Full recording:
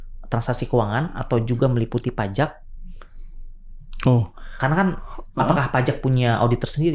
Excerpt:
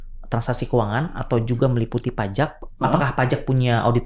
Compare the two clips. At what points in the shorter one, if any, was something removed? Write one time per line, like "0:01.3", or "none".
0:02.6